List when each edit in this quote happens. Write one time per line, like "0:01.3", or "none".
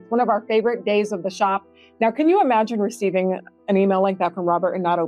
0:01.8